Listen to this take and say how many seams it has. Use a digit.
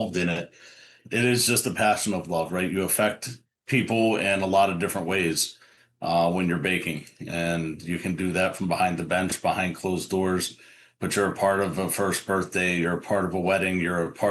1